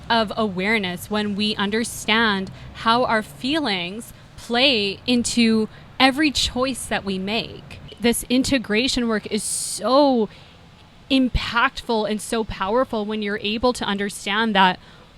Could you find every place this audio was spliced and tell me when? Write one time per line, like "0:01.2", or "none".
0:07.9